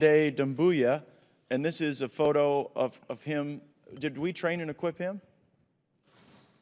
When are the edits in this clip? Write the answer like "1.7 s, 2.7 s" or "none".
none